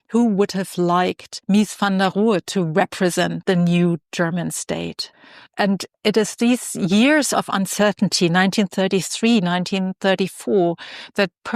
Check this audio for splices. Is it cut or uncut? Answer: cut